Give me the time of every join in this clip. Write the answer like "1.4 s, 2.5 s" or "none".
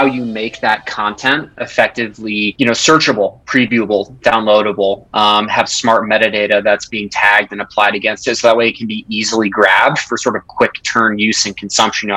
2.5 s